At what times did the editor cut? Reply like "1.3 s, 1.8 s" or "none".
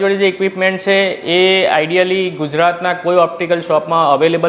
none